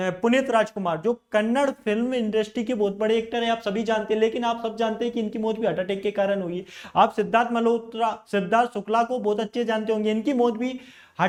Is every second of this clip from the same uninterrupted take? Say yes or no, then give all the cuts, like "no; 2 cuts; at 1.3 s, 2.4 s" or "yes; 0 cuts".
yes; 0 cuts